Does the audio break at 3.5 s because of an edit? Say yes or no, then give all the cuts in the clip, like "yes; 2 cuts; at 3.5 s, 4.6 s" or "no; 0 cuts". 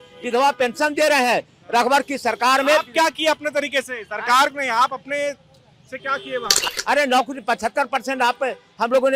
no; 1 cut; at 6.6 s